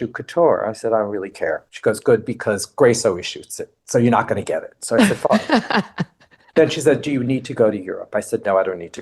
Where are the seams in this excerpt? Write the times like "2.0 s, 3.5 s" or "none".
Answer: none